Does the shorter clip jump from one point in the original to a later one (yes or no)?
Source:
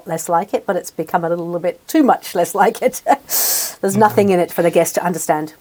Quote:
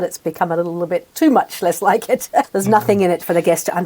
yes